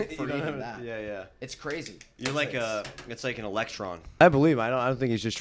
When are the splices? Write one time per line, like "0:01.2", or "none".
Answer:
0:04.2

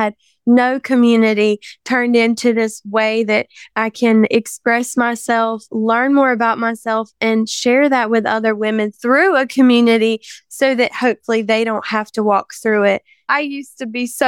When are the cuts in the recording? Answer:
0:04.3
0:13.3

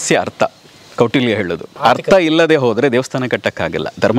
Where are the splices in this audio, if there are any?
0:01.7

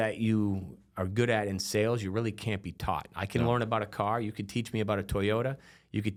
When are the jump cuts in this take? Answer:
none

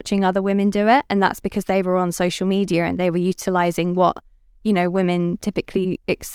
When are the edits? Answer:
none

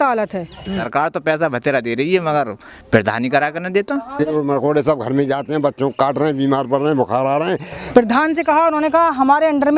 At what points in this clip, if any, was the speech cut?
0:01.1
0:04.3
0:07.7

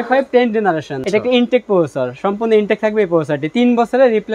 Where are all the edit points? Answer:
0:00.9

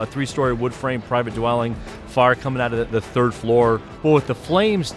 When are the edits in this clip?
0:03.9

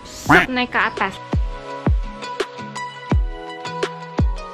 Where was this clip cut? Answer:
none

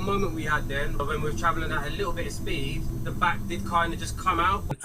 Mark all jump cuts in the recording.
0:01.0
0:02.9

